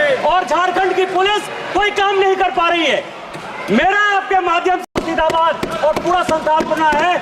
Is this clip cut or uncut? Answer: cut